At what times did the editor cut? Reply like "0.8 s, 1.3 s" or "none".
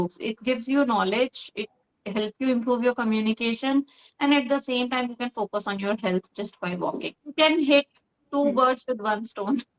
7.3 s